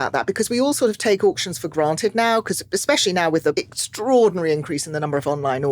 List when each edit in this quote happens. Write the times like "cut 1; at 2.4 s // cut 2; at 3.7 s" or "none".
cut 1; at 3.5 s